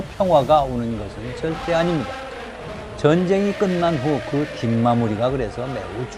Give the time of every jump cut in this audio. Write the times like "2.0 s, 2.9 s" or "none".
none